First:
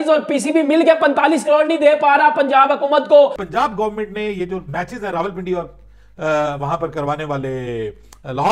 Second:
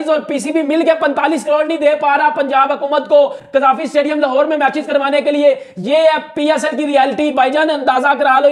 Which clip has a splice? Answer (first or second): first